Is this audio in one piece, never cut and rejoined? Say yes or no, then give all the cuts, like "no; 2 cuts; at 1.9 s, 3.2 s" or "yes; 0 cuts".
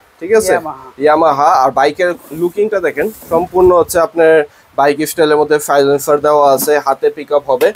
yes; 0 cuts